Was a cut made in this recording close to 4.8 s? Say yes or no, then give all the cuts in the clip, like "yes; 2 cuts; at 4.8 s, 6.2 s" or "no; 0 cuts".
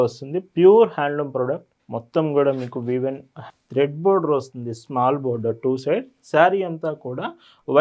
no; 1 cut; at 3.4 s